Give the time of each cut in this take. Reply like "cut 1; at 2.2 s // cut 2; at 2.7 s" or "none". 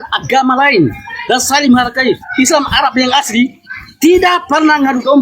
cut 1; at 2.3 s